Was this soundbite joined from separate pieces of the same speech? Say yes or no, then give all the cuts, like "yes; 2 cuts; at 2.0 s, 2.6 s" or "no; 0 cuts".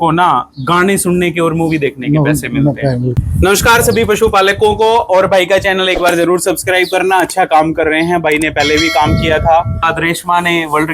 yes; 2 cuts; at 3.2 s, 9.9 s